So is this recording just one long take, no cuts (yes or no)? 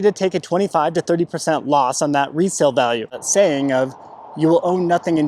no